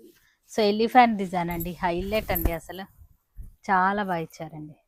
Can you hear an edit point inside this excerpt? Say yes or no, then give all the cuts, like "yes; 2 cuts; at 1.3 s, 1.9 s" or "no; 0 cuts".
no; 0 cuts